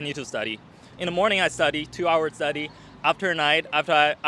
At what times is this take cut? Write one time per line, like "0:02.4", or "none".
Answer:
none